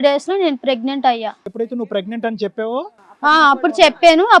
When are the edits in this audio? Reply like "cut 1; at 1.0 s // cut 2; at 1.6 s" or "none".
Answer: cut 1; at 1.4 s